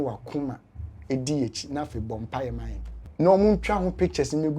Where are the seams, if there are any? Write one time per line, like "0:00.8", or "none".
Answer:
0:03.3